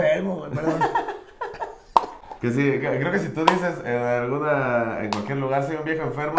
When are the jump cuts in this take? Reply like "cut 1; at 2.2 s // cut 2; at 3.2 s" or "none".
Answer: cut 1; at 2.3 s